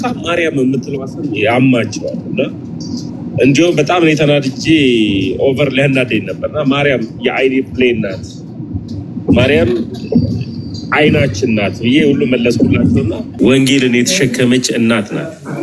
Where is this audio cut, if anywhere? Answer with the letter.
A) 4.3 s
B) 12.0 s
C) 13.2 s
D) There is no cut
C